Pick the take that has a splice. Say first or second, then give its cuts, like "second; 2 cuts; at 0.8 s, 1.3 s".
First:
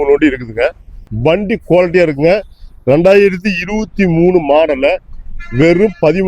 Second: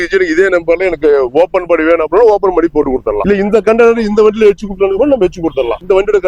first; 1 cut; at 1.1 s